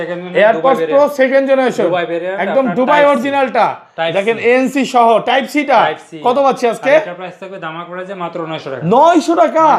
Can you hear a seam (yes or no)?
no